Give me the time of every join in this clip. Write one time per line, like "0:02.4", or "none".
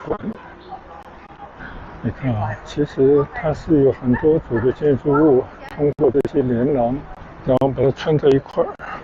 0:01.8